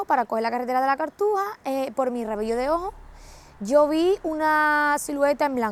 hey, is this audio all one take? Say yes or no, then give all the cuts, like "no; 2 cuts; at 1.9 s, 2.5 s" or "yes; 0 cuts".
yes; 0 cuts